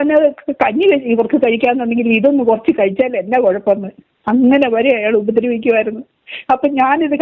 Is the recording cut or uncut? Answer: uncut